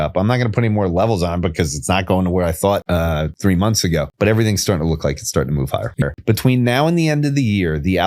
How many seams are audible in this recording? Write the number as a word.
three